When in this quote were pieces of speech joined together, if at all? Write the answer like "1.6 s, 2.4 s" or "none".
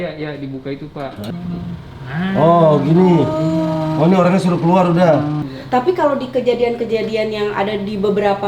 1.3 s, 5.4 s